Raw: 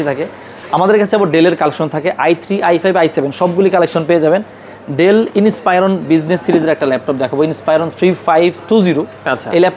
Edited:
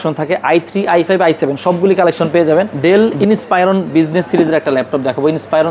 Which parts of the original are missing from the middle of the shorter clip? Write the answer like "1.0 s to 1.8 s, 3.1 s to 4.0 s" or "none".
4.5 s to 4.9 s